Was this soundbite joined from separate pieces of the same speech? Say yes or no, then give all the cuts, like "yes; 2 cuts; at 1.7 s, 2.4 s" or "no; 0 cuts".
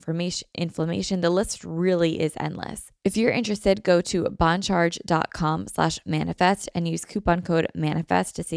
yes; 1 cut; at 2.8 s